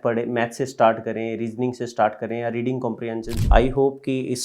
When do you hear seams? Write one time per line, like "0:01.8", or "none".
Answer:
0:03.3

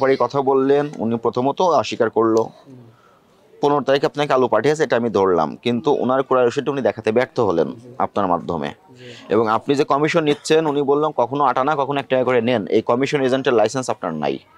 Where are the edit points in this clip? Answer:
none

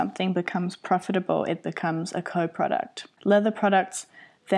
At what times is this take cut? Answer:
0:03.1

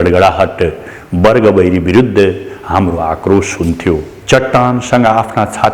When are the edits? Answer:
0:04.1

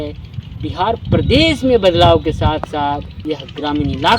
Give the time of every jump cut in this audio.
0:03.1

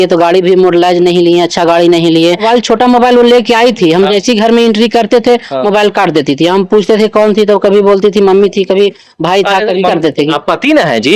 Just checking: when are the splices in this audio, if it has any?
0:02.4
0:09.9

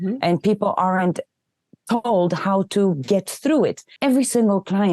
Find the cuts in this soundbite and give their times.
0:03.8

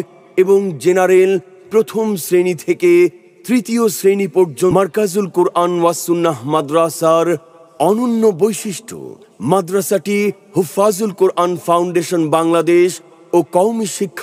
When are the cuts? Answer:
0:04.7

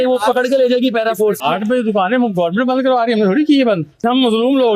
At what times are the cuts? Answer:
0:01.4
0:04.0

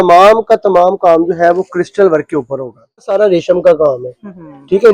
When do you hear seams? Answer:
0:03.1

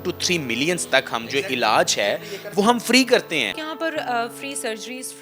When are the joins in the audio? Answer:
0:03.6

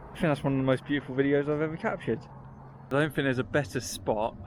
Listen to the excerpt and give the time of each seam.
0:02.7

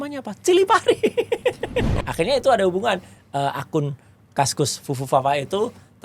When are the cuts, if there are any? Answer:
0:01.9

